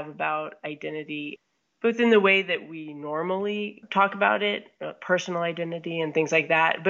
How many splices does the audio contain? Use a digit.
2